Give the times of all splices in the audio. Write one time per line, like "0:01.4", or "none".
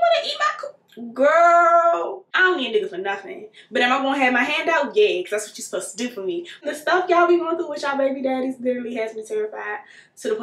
0:02.2
0:06.6